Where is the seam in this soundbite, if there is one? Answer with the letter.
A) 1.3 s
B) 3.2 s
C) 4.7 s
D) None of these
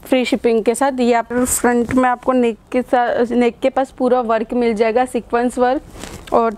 A